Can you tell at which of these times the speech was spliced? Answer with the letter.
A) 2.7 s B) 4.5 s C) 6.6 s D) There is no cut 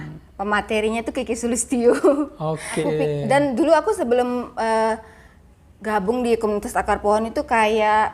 A